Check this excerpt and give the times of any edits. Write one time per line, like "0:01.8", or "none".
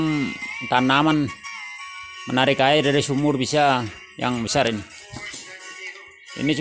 none

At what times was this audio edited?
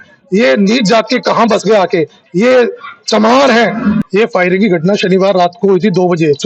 0:04.0

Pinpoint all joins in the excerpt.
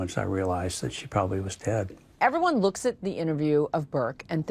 0:02.0

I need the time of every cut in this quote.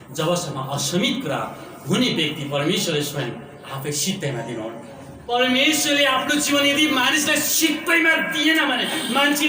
0:05.2

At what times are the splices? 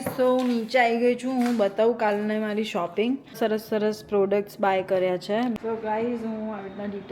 0:03.4
0:05.6

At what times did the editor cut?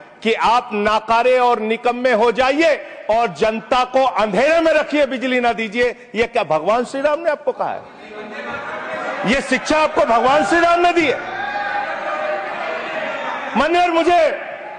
none

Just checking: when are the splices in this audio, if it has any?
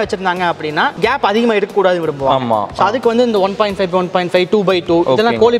0:00.9

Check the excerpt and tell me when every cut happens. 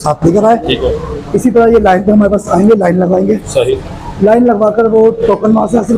none

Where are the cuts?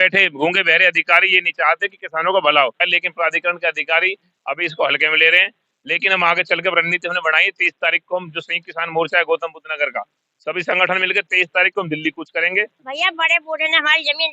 0:02.8
0:12.8

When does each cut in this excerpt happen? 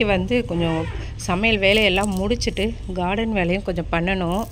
none

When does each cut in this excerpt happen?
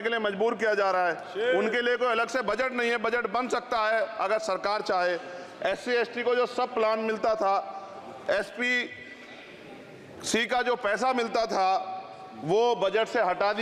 none

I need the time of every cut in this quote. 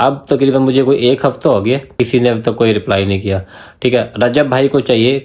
0:01.9

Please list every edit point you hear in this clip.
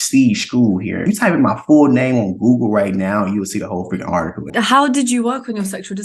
0:01.0
0:04.5

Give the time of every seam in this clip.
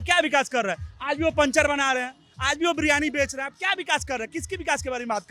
none

